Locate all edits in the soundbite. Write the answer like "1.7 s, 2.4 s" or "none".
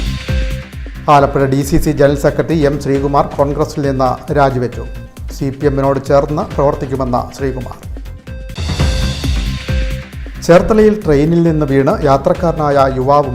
1.1 s

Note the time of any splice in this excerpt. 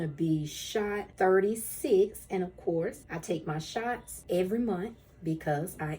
1.1 s, 3.1 s, 4.1 s

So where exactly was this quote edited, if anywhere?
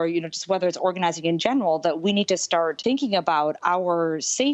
2.8 s

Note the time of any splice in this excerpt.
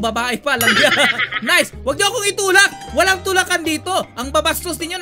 1.3 s

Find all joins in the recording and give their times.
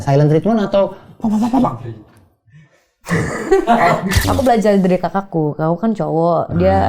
4.2 s

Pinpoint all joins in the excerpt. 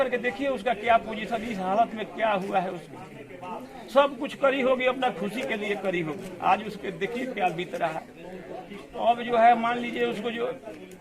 none

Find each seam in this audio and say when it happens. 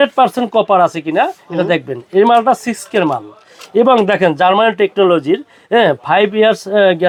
none

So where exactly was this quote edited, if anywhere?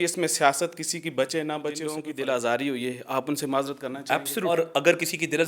2.1 s, 4.5 s

